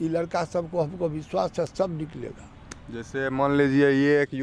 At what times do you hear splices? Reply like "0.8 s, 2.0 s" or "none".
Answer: none